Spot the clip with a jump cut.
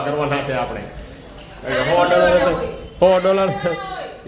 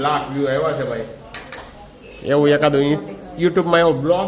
first; 1 cut; at 2.8 s

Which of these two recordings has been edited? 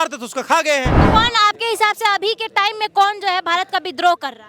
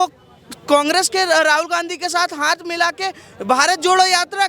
first; 1 cut; at 1.0 s

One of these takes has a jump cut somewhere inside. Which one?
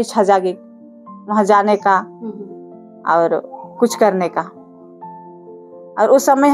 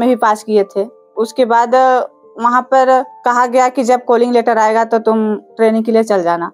second; 2 cuts; at 1.0 s, 3.1 s

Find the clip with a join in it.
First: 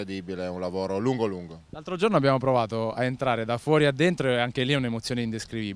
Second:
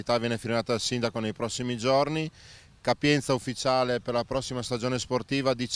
first; 1 cut; at 4.4 s

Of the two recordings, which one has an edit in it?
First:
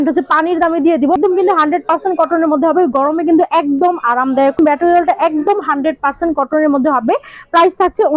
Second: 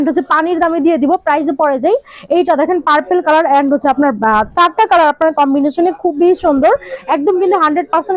first; 2 cuts; at 1.2 s, 4.6 s

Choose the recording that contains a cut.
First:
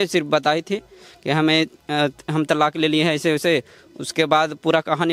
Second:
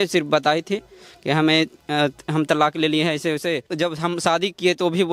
second; 1 cut; at 3.7 s

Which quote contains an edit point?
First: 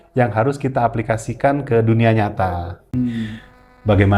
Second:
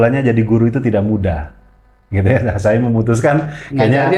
first; 1 cut; at 2.8 s

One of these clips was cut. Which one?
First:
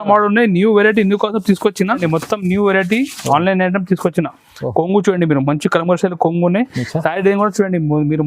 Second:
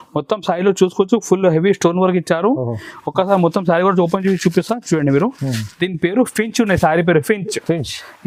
first; 1 cut; at 2.0 s

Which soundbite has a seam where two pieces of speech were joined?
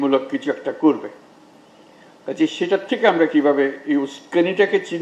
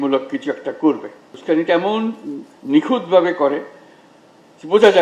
second; 1 cut; at 1.3 s

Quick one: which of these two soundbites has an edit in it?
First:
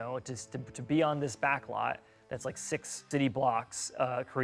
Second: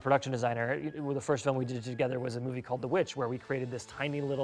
first; 1 cut; at 3.0 s

